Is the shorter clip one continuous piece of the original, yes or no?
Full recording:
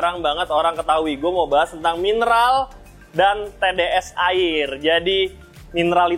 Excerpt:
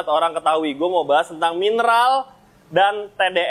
yes